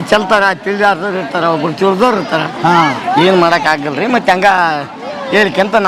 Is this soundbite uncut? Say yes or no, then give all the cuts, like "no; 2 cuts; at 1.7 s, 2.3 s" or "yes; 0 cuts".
yes; 0 cuts